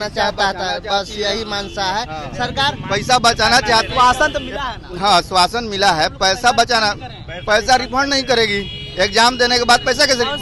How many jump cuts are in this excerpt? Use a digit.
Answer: 0